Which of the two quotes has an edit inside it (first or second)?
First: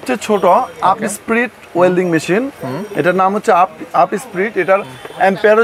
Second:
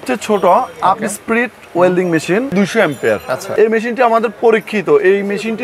second